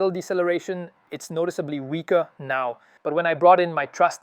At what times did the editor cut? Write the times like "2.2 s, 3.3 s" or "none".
1.0 s, 2.9 s